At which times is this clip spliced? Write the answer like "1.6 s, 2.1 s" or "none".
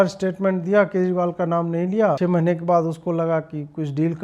2.2 s

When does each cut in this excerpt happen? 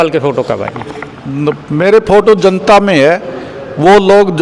none

